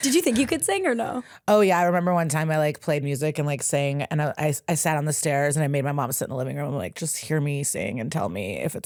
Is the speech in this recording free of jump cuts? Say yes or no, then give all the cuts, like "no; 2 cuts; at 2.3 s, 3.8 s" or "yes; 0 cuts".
yes; 0 cuts